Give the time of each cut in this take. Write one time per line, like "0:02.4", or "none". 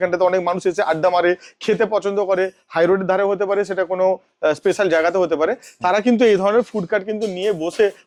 none